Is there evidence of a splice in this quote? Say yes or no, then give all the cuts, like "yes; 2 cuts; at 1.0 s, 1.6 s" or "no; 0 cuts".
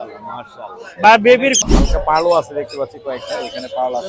yes; 1 cut; at 1.6 s